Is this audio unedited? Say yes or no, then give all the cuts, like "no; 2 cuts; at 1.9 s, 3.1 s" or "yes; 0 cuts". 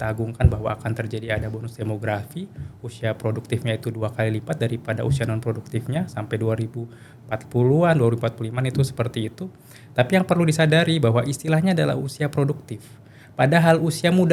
yes; 0 cuts